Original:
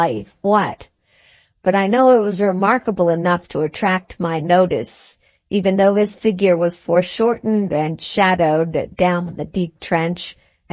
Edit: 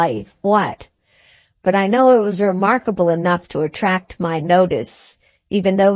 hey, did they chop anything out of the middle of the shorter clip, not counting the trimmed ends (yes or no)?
no